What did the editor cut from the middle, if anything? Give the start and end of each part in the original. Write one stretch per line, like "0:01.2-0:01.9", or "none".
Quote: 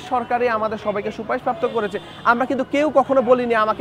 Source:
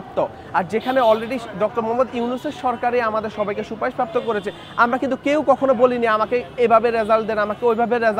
none